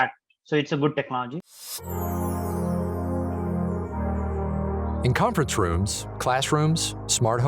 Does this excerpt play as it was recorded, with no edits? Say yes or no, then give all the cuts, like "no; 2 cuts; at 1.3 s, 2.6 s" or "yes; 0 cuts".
no; 1 cut; at 1.5 s